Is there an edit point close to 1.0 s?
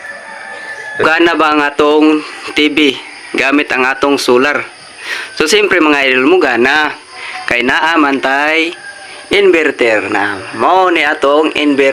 yes; 1 cut; at 1.0 s

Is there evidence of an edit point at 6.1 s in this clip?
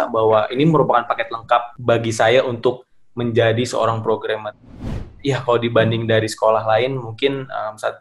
no; 2 cuts; at 1.7 s, 4.8 s

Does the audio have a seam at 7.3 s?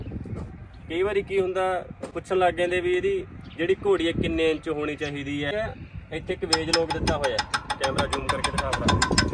no; 1 cut; at 5.5 s

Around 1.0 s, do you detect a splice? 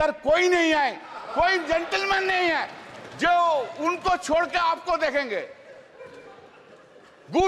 no; 0 cuts

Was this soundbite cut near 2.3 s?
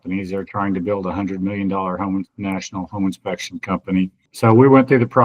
no; 1 cut; at 4.3 s

